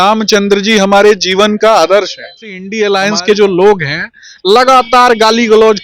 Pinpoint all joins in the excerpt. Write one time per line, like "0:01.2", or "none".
0:02.6